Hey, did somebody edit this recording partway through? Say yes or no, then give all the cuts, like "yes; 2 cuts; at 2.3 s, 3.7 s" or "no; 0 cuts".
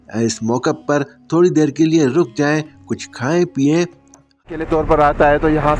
yes; 1 cut; at 4.5 s